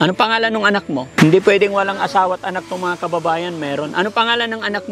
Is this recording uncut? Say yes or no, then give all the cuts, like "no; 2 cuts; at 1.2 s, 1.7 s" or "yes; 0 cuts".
no; 1 cut; at 1.2 s